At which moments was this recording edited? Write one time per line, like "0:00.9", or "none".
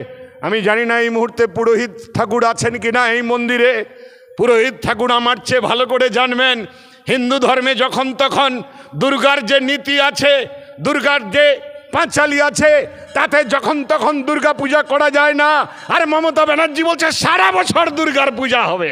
none